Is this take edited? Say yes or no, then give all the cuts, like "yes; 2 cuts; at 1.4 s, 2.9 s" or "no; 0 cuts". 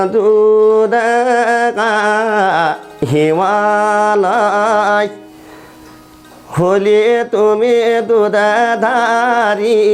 no; 0 cuts